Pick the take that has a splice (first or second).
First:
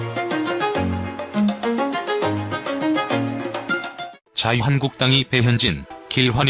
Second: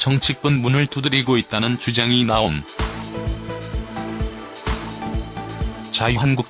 second